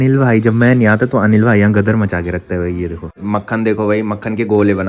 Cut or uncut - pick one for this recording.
cut